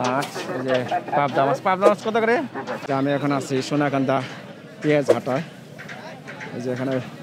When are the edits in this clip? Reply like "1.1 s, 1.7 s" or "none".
2.8 s